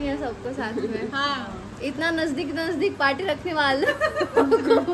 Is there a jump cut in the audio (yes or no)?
no